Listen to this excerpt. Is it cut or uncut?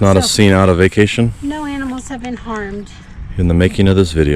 cut